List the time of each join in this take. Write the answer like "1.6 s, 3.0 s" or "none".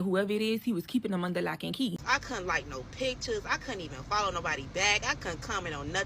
2.0 s